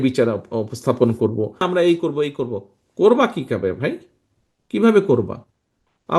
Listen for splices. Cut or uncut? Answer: cut